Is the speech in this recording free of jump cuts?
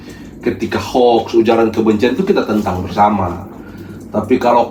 yes; 0 cuts

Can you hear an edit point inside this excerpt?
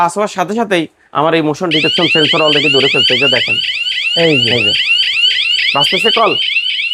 no; 0 cuts

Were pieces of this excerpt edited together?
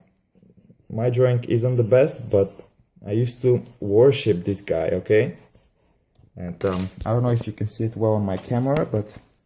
no; 0 cuts

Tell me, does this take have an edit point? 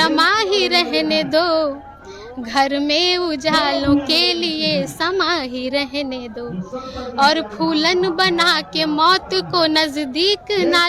no; 0 cuts

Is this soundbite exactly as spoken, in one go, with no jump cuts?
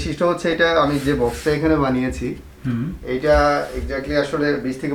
yes; 0 cuts

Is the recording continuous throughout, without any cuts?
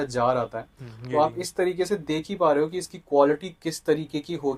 yes; 0 cuts

